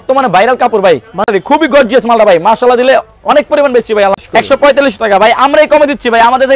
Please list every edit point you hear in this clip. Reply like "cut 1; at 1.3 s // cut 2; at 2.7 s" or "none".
cut 1; at 1.3 s // cut 2; at 4.1 s